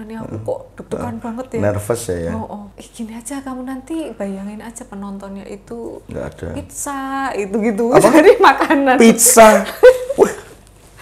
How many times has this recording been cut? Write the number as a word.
one